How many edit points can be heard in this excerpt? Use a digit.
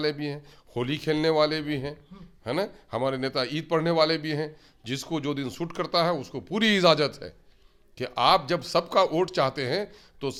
0